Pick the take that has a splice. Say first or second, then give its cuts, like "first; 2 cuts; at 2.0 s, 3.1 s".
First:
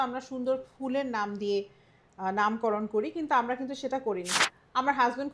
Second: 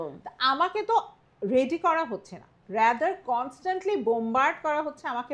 first; 1 cut; at 4.3 s